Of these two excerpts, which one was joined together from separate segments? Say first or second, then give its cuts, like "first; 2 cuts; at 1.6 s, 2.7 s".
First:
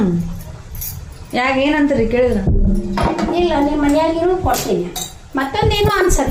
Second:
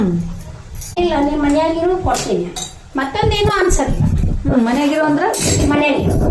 second; 1 cut; at 0.9 s